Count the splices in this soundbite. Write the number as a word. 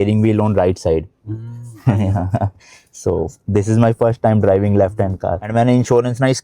one